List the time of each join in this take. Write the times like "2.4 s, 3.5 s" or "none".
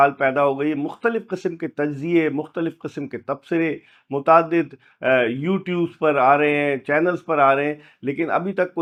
none